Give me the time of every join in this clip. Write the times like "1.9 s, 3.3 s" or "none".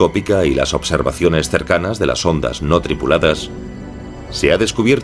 2.2 s